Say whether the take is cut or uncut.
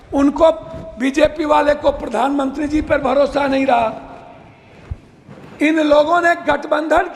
uncut